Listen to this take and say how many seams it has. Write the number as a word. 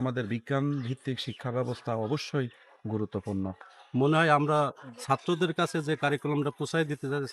one